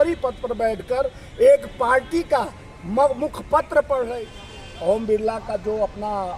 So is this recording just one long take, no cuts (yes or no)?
no